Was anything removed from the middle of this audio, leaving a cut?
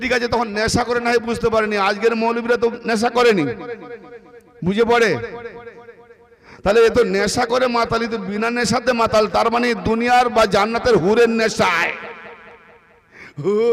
no; 0 cuts

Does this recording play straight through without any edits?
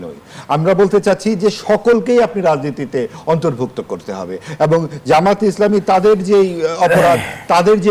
yes; 0 cuts

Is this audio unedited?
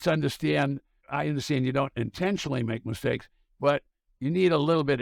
no; 1 cut; at 1.0 s

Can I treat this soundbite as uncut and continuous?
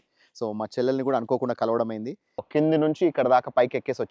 no; 1 cut; at 2.4 s

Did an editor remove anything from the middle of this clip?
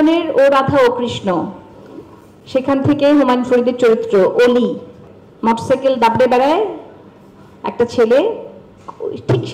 no; 0 cuts

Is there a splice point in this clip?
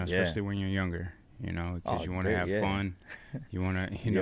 no; 0 cuts

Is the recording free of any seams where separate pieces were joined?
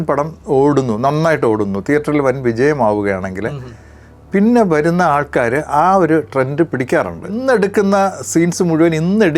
no; 1 cut; at 7.4 s

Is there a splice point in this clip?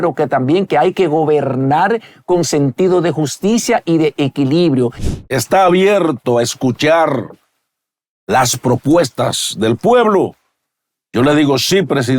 yes; 1 cut; at 5.0 s

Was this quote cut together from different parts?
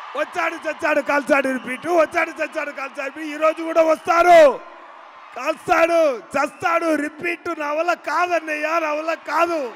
no; 0 cuts

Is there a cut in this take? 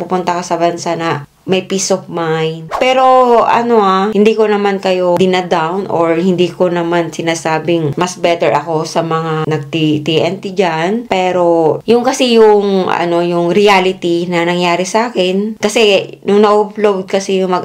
no; 0 cuts

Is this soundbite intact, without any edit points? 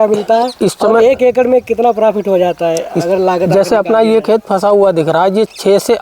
yes; 0 cuts

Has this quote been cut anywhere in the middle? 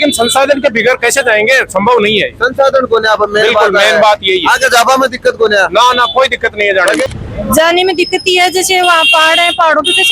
yes; 1 cut; at 7.0 s

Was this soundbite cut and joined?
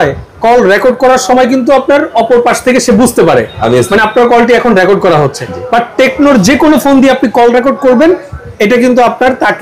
no; 0 cuts

